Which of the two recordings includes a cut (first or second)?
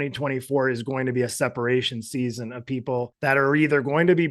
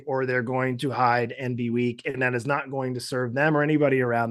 first